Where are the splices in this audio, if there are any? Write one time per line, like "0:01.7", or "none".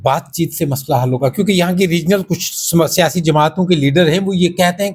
none